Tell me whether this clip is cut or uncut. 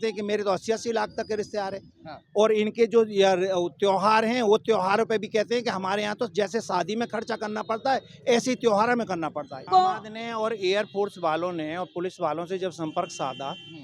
cut